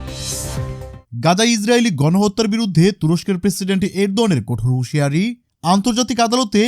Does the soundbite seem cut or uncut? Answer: cut